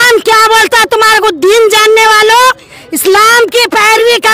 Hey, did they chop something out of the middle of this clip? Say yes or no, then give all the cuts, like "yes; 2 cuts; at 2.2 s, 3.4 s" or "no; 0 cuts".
no; 0 cuts